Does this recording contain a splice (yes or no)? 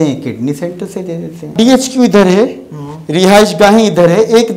yes